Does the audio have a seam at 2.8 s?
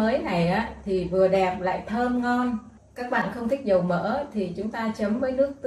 yes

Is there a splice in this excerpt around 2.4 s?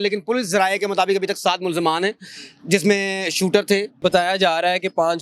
no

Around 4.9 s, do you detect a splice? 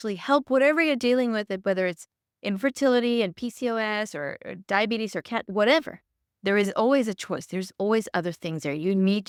no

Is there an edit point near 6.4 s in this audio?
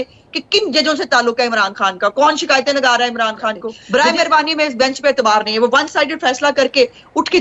no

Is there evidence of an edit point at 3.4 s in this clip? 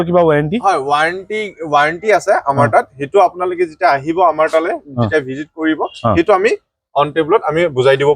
no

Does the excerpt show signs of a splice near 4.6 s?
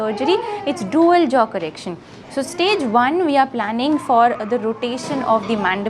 no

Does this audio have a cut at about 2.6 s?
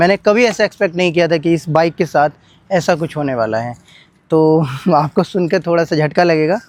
no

